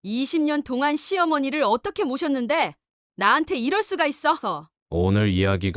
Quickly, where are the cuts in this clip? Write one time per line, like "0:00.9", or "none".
0:04.7

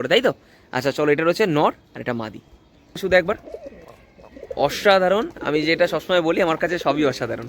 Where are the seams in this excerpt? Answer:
0:03.0

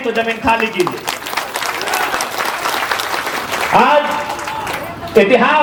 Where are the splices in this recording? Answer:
none

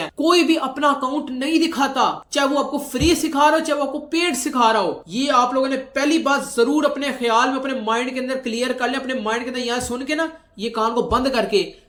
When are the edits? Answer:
none

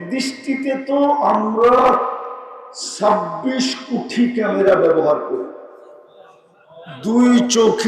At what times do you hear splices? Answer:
none

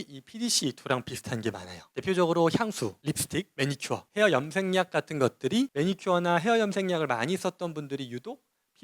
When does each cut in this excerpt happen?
0:05.7

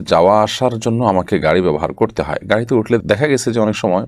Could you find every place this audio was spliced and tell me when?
none

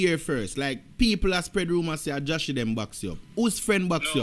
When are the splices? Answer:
none

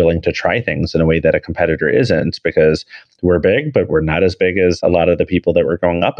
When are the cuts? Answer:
0:04.8

